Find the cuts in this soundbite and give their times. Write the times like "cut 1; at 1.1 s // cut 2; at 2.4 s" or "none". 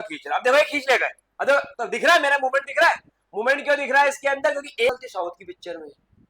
cut 1; at 4.9 s